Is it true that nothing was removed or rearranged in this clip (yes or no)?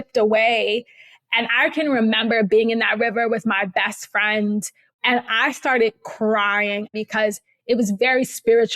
no